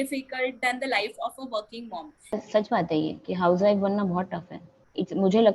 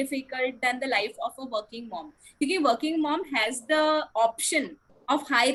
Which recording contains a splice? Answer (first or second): first